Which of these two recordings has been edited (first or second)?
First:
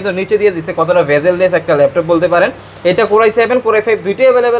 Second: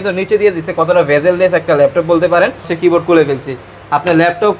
second